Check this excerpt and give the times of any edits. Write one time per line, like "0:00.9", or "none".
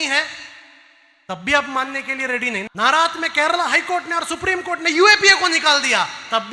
0:02.6